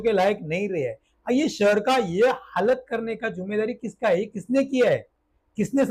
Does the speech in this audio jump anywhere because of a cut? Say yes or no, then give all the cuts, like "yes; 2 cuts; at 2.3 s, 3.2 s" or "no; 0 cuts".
no; 0 cuts